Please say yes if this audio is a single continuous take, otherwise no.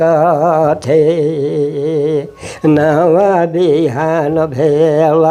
yes